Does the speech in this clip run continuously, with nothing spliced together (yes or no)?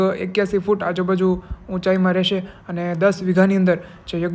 yes